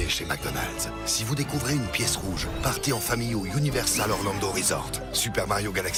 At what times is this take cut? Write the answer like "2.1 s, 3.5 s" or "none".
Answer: none